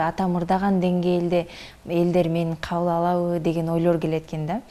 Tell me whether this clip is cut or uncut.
uncut